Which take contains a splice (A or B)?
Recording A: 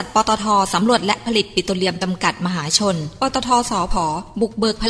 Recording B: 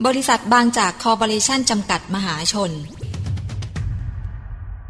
B